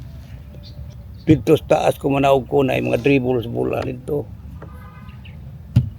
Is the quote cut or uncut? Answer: cut